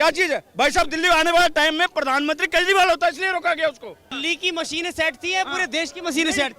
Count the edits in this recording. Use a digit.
1